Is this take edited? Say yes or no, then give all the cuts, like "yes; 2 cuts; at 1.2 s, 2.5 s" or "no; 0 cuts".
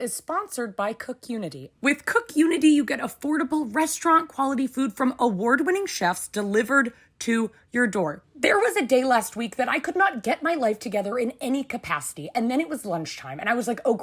yes; 2 cuts; at 1.6 s, 8.2 s